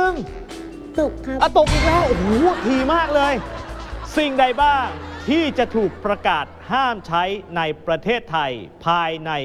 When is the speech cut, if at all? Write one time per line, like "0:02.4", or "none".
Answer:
0:03.6

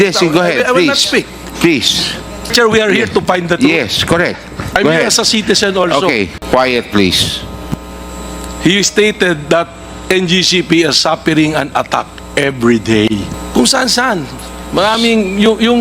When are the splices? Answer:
0:02.5
0:06.4
0:13.3

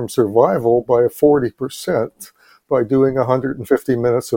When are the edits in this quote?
none

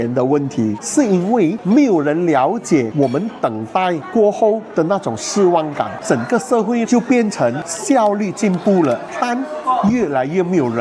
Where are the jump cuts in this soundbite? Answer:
0:00.8
0:01.6
0:06.0
0:07.7
0:09.1

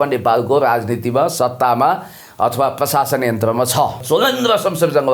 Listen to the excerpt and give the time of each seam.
0:04.0

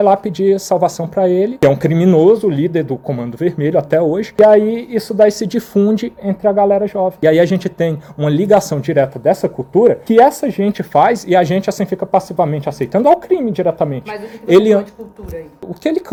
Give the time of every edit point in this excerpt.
none

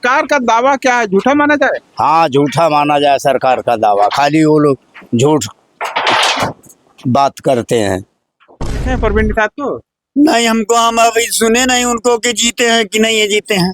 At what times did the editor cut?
0:08.7

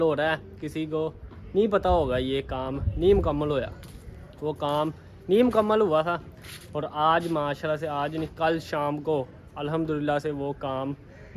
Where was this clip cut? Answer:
none

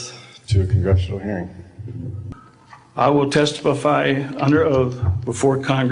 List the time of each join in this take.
0:02.2

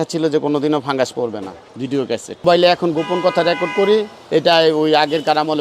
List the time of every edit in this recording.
0:02.4
0:04.2

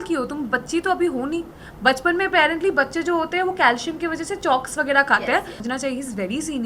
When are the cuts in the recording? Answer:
0:05.6

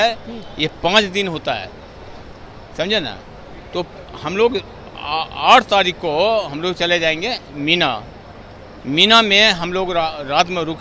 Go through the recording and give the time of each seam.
none

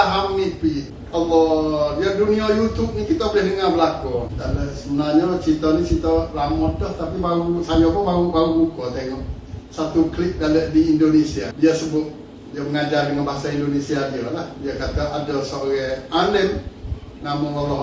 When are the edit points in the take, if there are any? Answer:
0:00.9
0:04.4
0:11.5

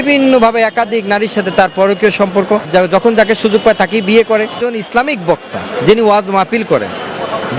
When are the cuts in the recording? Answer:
0:02.7
0:04.6

